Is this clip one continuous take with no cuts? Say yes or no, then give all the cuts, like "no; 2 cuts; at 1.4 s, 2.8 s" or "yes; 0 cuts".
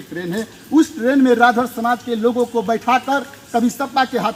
yes; 0 cuts